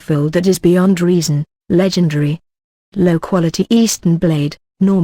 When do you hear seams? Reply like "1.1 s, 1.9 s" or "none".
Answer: 0.9 s